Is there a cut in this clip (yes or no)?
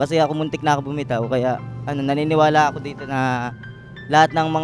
no